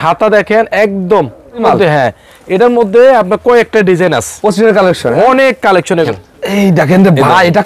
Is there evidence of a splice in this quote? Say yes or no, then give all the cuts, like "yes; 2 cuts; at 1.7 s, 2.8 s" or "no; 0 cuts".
yes; 2 cuts; at 1.6 s, 6.1 s